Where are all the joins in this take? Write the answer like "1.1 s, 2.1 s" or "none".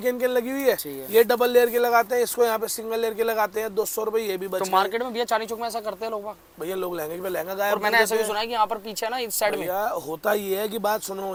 none